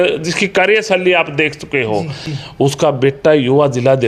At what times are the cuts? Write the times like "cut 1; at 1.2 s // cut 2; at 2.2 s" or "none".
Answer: cut 1; at 2.7 s